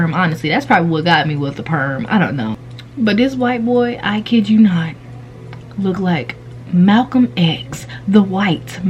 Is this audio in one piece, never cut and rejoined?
yes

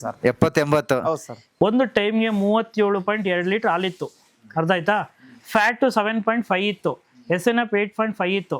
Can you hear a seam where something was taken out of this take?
yes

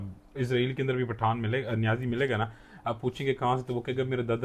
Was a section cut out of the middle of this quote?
no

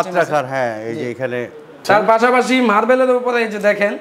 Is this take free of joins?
no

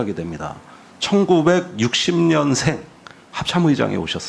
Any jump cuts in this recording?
yes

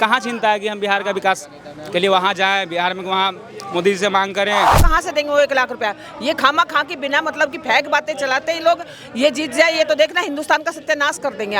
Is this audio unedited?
no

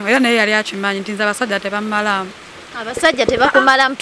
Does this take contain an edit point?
no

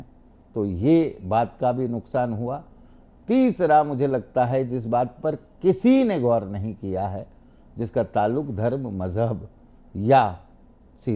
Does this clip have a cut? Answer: no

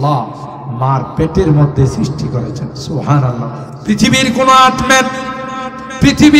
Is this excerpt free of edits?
no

